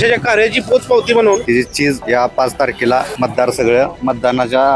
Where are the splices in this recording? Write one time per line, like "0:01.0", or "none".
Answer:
0:01.8
0:03.1
0:04.0